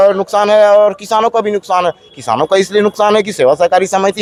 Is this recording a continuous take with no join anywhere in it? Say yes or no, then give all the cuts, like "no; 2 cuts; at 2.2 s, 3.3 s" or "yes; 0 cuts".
yes; 0 cuts